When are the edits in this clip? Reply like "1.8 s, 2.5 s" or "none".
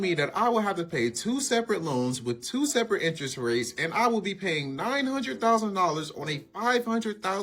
none